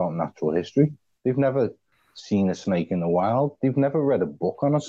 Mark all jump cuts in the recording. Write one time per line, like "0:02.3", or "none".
none